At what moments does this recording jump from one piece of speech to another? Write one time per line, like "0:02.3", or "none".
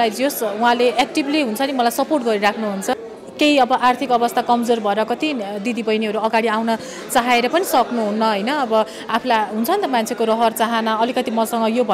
0:03.1